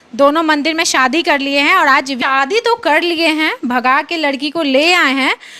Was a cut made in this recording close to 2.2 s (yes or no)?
yes